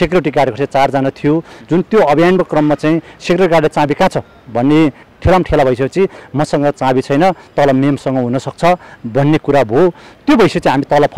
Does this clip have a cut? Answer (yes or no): yes